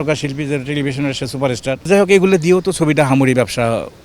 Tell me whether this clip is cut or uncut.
cut